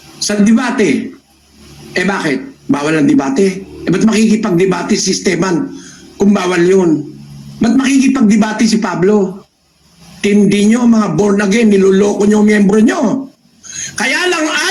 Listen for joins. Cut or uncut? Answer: uncut